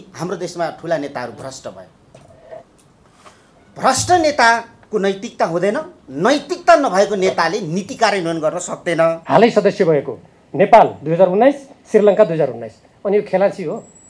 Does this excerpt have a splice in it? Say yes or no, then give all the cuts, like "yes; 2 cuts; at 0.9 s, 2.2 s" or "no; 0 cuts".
yes; 1 cut; at 9.2 s